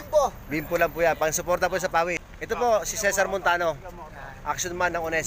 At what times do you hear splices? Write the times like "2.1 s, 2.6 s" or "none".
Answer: 2.3 s